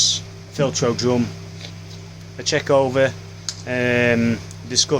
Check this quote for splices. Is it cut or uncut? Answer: uncut